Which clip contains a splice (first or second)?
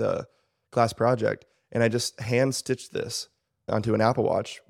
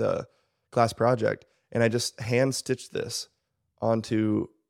first